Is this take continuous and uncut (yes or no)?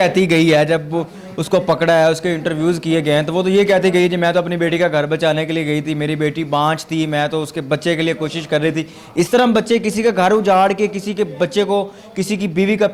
yes